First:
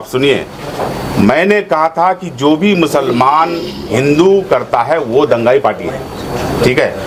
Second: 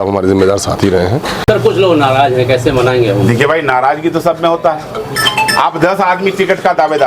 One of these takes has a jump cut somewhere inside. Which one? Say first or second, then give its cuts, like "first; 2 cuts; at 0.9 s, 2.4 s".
second; 1 cut; at 1.4 s